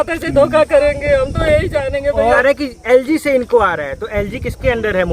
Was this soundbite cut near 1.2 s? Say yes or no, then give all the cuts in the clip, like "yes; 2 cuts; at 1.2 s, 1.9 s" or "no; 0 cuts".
no; 1 cut; at 2.4 s